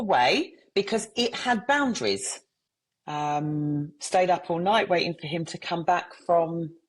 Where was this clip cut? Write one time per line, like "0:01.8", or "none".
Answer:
0:02.3